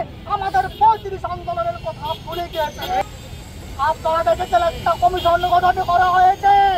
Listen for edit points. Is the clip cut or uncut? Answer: cut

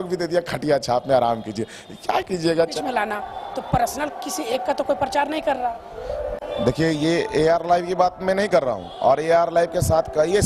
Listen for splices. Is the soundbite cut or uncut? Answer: cut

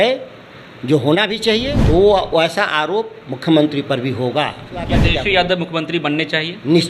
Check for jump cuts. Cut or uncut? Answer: cut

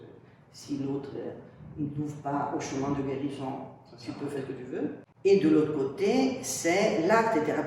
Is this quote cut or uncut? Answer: cut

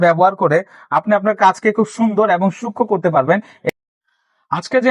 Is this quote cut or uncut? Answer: cut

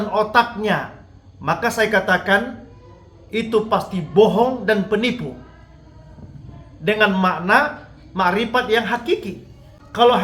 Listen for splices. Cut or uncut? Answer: cut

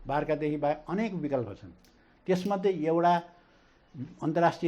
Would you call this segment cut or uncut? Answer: uncut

